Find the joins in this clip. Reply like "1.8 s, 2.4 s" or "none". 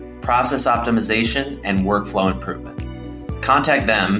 none